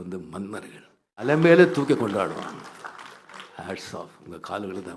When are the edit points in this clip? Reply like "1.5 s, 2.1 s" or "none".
1.2 s

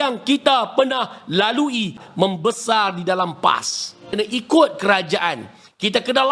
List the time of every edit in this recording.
2.0 s, 4.1 s

